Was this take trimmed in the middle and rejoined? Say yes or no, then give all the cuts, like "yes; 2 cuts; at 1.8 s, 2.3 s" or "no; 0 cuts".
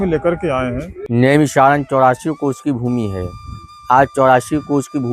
yes; 1 cut; at 0.9 s